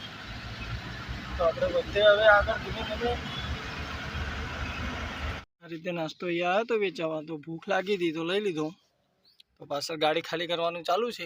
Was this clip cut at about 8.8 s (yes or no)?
no